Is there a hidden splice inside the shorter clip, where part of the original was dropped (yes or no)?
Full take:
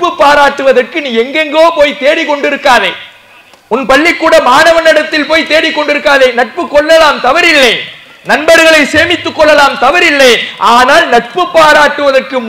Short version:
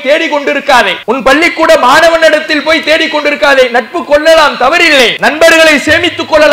yes